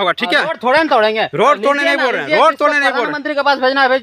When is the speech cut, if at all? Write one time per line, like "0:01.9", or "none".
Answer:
none